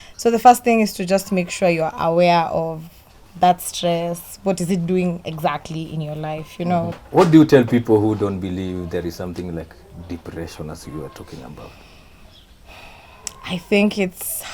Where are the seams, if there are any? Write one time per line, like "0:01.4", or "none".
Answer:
0:06.9